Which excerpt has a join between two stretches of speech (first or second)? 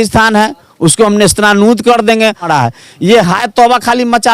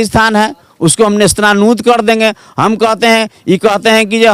first